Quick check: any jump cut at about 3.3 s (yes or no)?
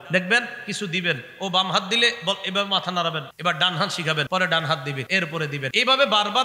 yes